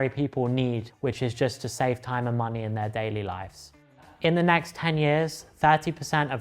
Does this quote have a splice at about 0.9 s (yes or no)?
no